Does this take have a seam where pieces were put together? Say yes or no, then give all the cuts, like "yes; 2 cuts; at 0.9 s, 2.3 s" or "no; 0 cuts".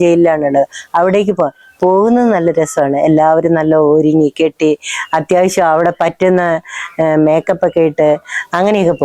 no; 0 cuts